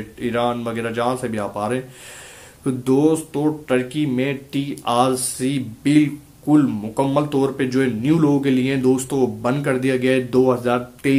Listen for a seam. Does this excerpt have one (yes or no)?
no